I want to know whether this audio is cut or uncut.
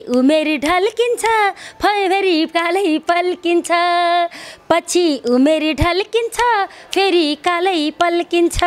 uncut